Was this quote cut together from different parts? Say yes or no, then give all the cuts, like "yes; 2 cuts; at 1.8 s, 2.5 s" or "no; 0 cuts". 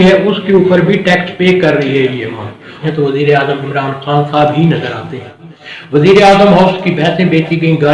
yes; 1 cut; at 2.8 s